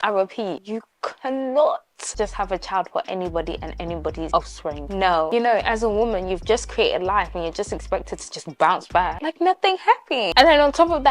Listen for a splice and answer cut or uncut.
cut